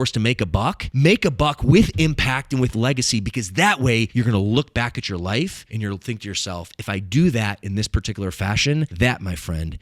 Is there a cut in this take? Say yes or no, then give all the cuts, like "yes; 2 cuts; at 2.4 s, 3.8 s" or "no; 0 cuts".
yes; 4 cuts; at 0.9 s, 4.1 s, 5.6 s, 8.9 s